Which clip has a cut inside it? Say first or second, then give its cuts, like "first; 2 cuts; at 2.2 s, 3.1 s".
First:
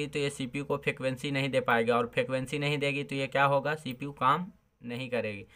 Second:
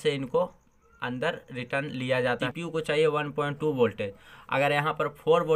second; 1 cut; at 2.5 s